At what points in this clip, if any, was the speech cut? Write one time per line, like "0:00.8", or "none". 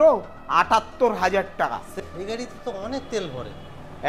0:01.9